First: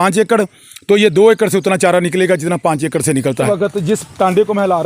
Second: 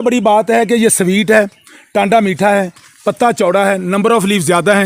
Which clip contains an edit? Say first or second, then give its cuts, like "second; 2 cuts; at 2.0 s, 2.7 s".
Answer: first; 1 cut; at 3.5 s